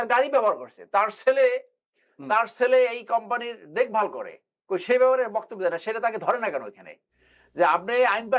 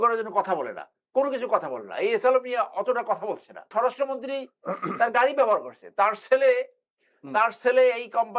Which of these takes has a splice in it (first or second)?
second